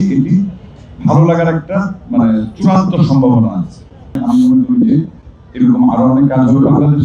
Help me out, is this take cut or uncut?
cut